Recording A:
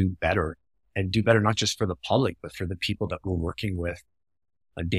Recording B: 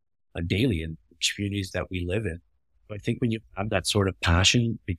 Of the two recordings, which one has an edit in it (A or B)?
B